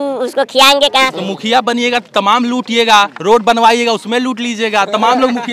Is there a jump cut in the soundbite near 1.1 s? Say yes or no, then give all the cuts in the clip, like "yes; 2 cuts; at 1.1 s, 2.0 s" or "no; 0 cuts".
yes; 1 cut; at 1.1 s